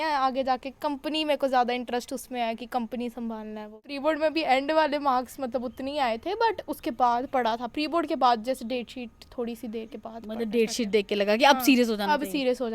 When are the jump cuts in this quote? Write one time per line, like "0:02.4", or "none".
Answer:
0:03.9